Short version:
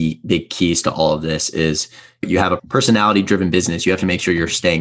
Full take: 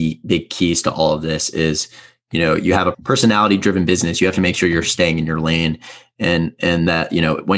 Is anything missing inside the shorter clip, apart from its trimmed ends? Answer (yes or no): yes